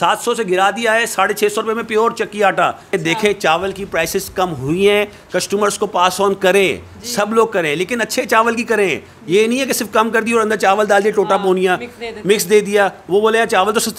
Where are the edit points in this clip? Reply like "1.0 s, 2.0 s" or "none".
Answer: 2.9 s